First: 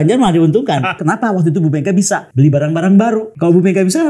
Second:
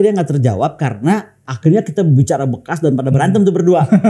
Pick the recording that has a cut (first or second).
first